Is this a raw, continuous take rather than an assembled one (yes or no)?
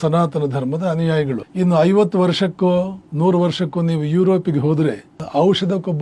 no